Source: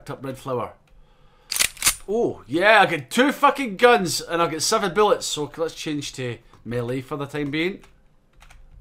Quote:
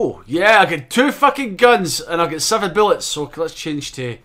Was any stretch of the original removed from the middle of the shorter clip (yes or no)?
no